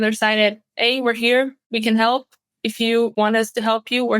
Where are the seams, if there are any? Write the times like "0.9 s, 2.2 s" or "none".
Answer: 1.6 s, 3.1 s